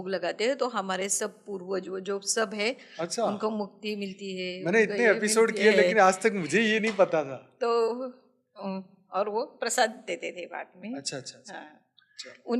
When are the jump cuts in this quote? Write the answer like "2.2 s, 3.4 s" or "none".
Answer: none